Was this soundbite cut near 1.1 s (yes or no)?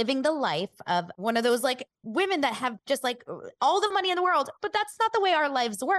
yes